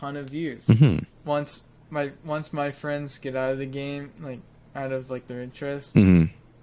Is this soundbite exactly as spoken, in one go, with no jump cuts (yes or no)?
no